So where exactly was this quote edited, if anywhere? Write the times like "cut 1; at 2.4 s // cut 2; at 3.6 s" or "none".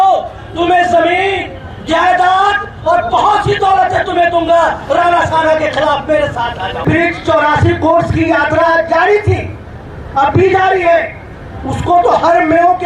cut 1; at 6.8 s